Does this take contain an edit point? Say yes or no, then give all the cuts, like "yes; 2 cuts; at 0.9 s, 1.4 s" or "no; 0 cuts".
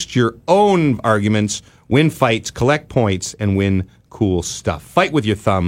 no; 0 cuts